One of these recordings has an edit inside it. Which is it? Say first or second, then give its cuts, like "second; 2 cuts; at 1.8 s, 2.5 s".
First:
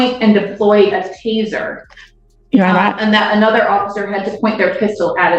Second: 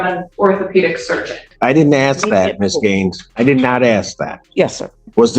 second; 1 cut; at 1.5 s